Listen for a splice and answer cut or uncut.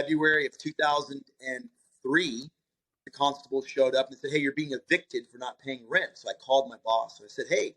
cut